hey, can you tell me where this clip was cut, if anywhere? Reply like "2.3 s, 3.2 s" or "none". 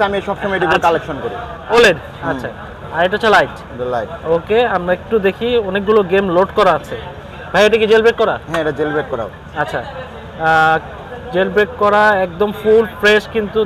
1.5 s